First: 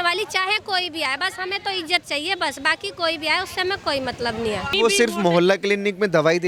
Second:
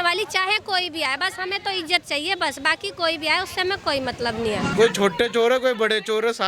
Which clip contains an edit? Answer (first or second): second